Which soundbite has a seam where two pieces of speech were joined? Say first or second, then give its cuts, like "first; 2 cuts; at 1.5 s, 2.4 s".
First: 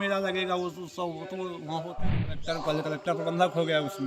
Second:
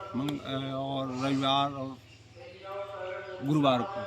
first; 1 cut; at 2.2 s